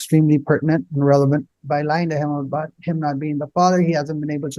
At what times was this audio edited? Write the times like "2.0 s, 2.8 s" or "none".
1.6 s